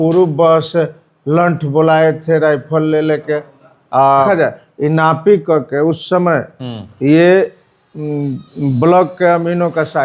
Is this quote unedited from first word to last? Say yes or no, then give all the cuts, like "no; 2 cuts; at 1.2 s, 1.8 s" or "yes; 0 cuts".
no; 1 cut; at 4.3 s